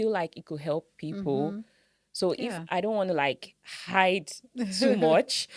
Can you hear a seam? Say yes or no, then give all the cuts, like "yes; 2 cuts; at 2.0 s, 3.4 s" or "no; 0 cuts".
no; 0 cuts